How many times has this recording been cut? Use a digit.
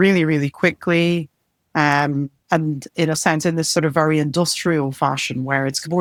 0